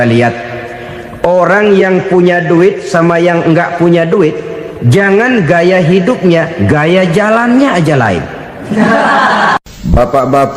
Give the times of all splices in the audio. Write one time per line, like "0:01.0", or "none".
0:09.6